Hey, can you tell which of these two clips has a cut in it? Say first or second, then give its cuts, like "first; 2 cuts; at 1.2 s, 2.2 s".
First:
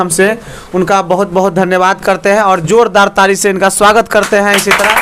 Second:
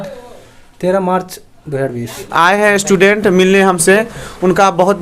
second; 1 cut; at 2.3 s